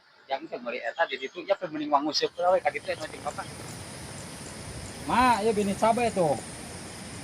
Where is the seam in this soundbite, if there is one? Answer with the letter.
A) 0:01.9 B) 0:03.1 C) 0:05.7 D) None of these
B